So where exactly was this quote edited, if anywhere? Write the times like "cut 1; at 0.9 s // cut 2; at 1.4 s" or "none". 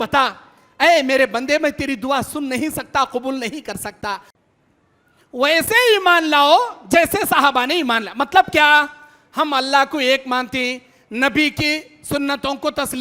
cut 1; at 4.3 s